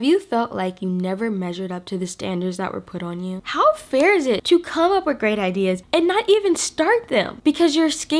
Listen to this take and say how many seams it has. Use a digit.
2